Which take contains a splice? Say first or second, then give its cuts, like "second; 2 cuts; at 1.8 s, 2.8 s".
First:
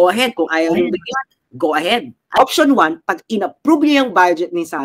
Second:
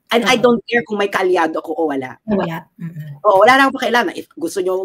first; 1 cut; at 2.2 s